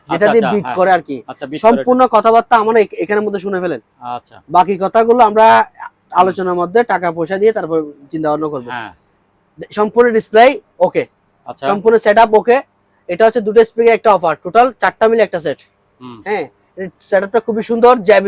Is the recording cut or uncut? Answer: uncut